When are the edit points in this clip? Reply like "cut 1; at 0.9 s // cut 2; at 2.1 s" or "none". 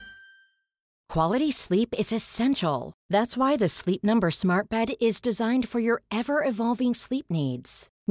cut 1; at 1.0 s